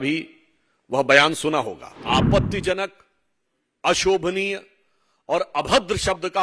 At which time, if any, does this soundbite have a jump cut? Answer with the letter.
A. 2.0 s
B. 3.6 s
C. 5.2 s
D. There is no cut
A